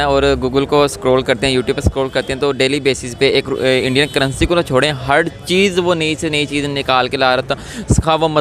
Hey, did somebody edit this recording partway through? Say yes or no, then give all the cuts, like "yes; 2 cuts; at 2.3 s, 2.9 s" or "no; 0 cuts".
no; 0 cuts